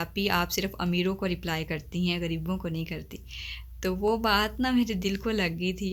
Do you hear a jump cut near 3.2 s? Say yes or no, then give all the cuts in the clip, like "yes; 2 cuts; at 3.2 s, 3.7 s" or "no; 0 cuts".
no; 0 cuts